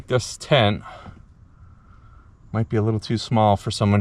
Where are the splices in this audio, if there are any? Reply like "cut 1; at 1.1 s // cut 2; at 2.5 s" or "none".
none